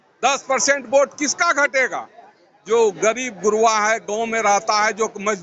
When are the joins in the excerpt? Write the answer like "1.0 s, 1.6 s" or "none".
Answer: none

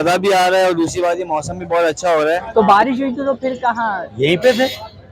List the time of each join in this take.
2.4 s

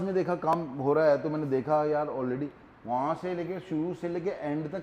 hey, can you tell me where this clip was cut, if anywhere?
none

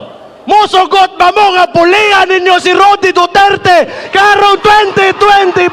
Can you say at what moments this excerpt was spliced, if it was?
none

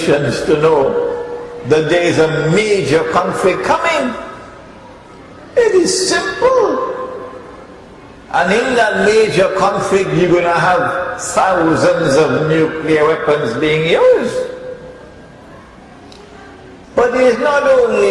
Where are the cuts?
2.6 s

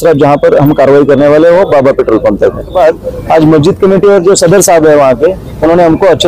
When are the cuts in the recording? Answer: 2.7 s

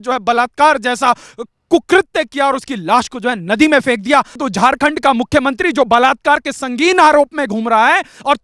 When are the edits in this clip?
4.4 s

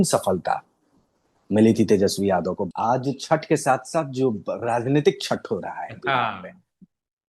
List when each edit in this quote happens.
2.6 s

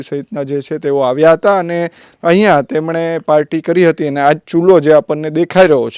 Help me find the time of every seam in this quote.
none

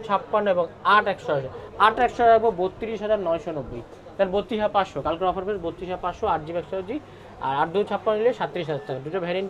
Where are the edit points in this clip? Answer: none

